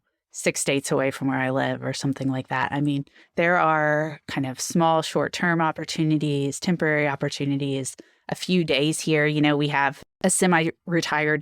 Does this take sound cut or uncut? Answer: cut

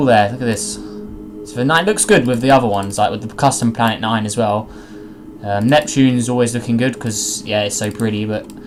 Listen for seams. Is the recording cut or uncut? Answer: uncut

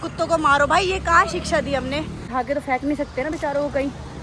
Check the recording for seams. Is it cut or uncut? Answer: cut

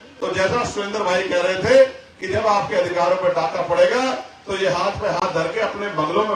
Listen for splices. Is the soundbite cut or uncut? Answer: uncut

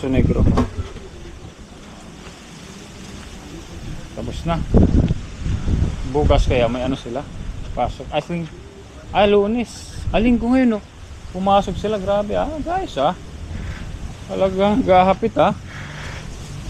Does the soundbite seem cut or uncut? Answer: uncut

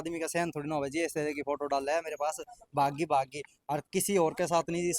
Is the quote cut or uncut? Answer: uncut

